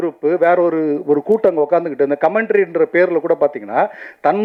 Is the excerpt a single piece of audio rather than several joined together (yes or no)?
yes